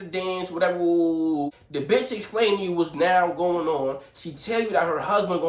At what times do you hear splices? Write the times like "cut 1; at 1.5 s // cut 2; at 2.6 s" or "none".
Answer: cut 1; at 1.6 s